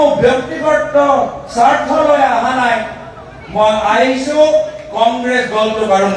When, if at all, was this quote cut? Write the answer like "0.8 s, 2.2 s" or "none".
none